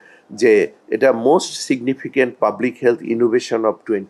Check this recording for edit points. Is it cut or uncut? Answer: uncut